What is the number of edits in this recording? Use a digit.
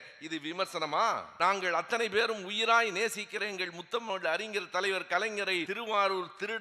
2